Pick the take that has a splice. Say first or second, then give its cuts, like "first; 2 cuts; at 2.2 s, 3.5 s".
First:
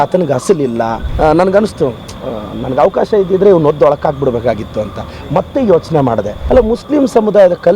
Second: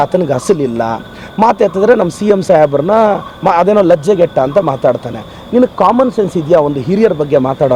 first; 2 cuts; at 1.0 s, 6.4 s